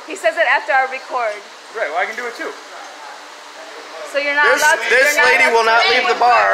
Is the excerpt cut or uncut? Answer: cut